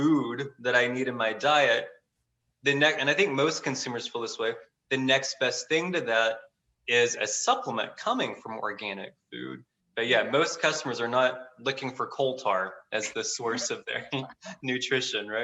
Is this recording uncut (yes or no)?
yes